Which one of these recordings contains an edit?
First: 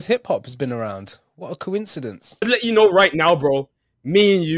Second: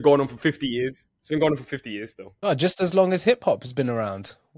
first; 1 cut; at 2.7 s

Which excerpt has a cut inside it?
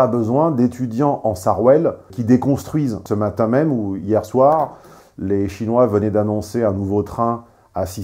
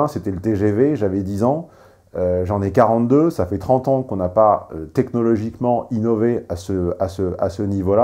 first; 2 cuts; at 2.1 s, 3.0 s

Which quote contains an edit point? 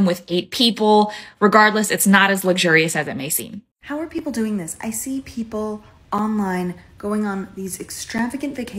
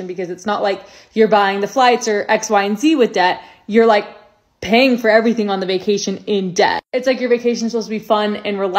first; 1 cut; at 3.7 s

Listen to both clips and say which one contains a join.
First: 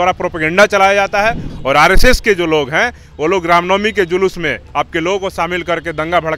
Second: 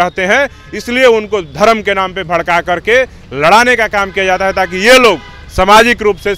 first; 1 cut; at 1.5 s

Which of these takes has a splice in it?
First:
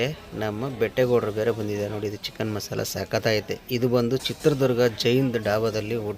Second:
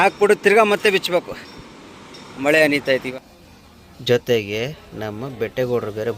second; 1 cut; at 3.1 s

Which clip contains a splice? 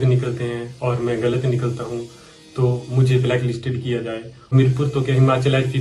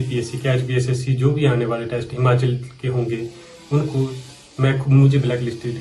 first; 1 cut; at 4.5 s

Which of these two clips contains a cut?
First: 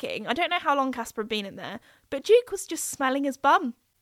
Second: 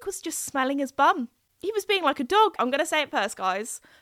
second; 1 cut; at 2.5 s

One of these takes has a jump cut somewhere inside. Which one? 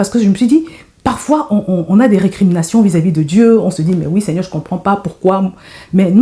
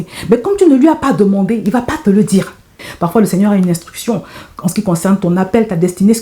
second; 1 cut; at 2.9 s

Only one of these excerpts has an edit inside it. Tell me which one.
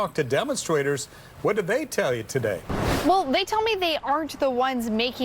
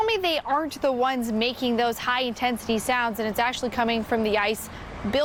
first; 1 cut; at 2.7 s

